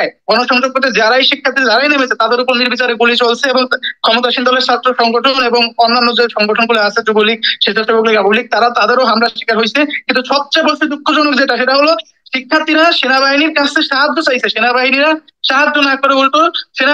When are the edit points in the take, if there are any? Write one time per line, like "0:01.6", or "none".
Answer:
none